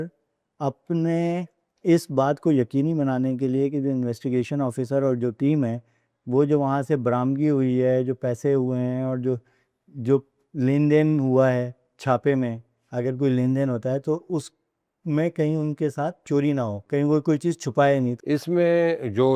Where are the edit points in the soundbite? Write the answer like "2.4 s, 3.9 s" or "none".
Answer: 16.8 s, 18.1 s